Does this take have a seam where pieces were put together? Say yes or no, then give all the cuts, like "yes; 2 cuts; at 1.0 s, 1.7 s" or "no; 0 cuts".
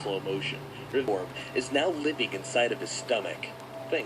yes; 1 cut; at 1.1 s